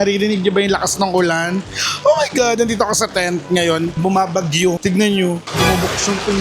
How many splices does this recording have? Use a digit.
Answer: 2